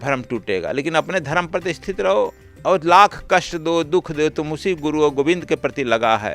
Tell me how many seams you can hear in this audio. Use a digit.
1